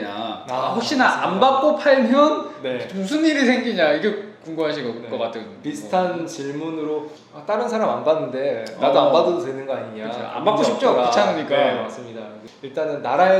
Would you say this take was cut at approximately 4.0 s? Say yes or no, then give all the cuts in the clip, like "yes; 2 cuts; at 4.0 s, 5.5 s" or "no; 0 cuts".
no; 0 cuts